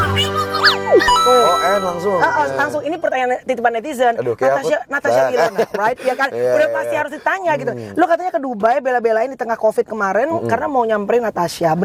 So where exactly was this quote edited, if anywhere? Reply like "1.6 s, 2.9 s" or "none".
none